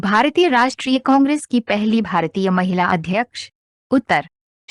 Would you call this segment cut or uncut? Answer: uncut